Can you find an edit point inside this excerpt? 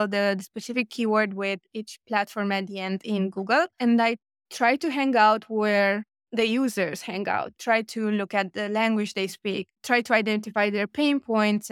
yes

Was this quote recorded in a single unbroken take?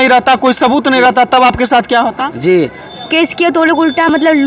no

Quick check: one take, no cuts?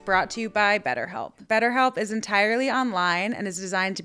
no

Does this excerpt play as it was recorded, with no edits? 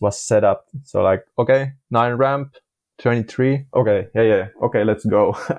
yes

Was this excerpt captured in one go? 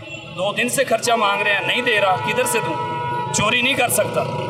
yes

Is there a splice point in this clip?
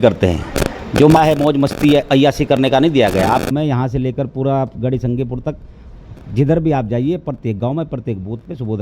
yes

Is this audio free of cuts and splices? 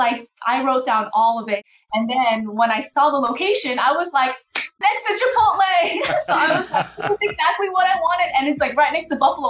no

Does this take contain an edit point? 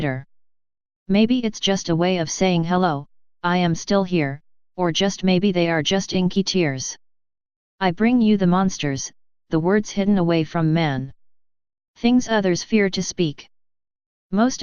no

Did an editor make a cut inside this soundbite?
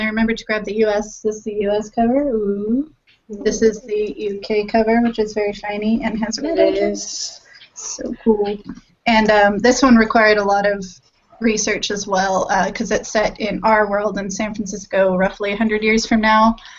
no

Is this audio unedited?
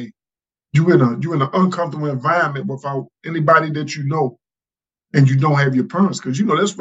yes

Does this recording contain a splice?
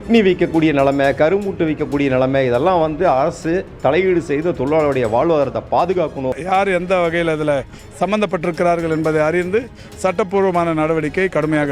yes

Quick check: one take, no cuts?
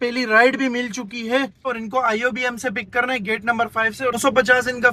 yes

